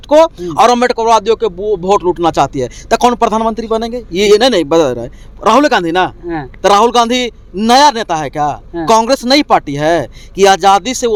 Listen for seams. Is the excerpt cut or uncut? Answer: uncut